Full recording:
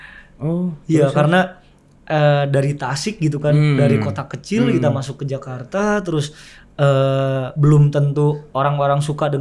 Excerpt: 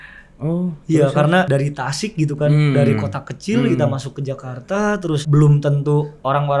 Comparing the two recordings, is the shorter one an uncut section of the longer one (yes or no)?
no